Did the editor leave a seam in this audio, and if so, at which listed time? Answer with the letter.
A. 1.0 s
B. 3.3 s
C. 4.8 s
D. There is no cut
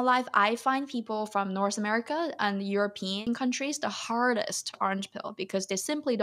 B